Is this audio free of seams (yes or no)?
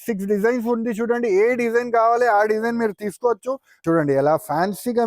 no